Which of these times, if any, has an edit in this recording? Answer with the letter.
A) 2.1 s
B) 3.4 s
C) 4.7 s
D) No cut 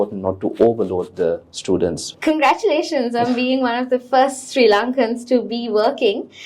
A